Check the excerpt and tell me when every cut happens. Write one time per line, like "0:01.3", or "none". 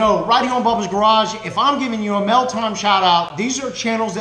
0:03.3